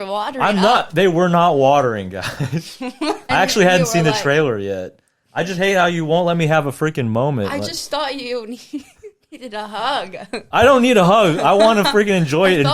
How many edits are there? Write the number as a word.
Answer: one